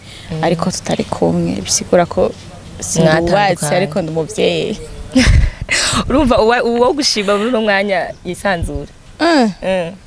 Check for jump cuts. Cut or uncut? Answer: uncut